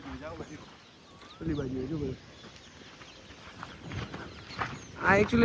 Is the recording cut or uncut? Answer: uncut